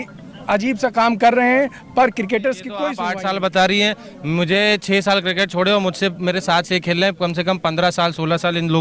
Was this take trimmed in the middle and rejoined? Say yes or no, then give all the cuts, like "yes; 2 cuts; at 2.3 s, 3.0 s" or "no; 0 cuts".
yes; 1 cut; at 3.0 s